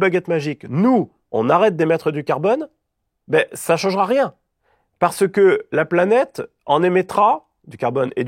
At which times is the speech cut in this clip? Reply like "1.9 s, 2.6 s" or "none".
none